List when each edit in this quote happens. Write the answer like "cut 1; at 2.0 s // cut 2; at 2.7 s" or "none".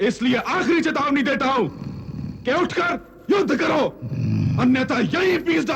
none